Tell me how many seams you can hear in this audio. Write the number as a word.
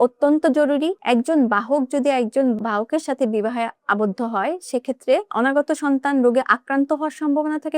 one